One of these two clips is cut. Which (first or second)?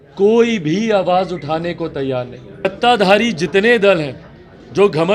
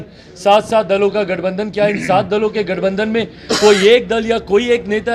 first